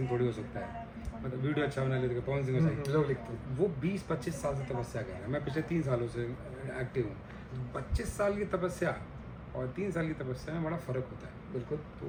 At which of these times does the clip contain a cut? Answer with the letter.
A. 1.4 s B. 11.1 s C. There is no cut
C